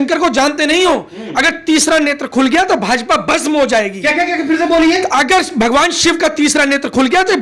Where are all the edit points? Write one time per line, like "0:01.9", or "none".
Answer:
none